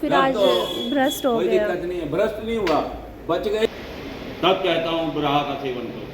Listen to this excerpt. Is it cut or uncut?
cut